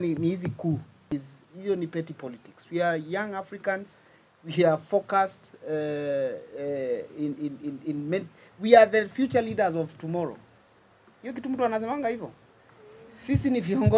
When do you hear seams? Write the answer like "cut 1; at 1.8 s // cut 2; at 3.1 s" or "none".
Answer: cut 1; at 0.9 s